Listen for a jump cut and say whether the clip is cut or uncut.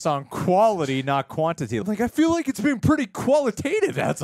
cut